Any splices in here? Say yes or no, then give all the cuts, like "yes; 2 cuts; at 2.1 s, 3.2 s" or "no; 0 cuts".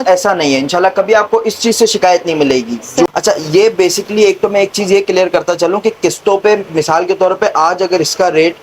yes; 1 cut; at 3.1 s